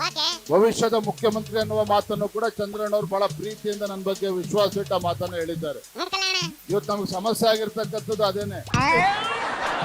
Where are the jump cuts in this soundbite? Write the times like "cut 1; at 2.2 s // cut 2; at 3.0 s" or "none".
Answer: cut 1; at 8.6 s